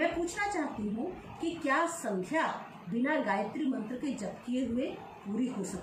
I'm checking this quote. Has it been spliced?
no; 0 cuts

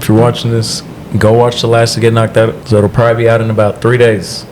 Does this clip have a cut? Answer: yes; 1 cut; at 2.6 s

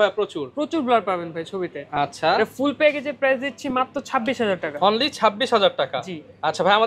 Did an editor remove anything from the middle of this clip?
no; 0 cuts

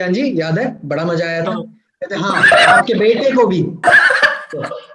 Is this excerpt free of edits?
no; 1 cut; at 3.8 s

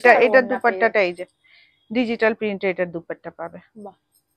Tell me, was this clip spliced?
no; 0 cuts

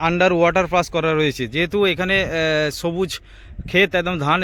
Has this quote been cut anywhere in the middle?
no; 0 cuts

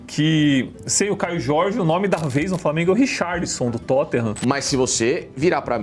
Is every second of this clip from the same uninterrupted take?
no; 1 cut; at 4.4 s

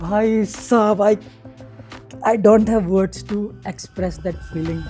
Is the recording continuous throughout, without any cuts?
yes; 0 cuts

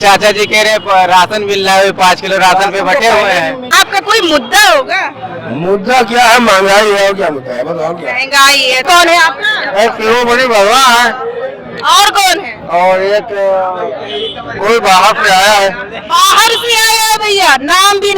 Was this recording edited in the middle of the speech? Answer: yes; 2 cuts; at 3.6 s, 8.8 s

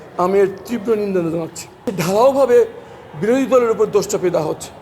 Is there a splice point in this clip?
yes; 1 cut; at 1.9 s

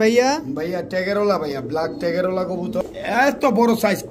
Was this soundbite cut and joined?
yes; 1 cut; at 2.8 s

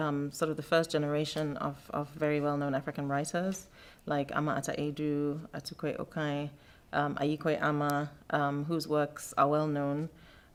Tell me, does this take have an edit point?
no; 0 cuts

